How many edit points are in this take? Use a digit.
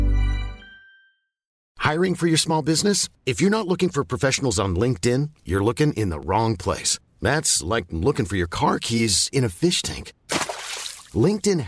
1